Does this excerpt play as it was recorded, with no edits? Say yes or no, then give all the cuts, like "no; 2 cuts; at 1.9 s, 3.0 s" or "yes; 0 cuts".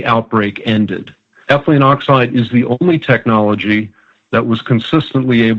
no; 1 cut; at 1.3 s